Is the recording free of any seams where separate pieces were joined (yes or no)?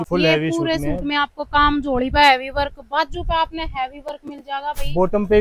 yes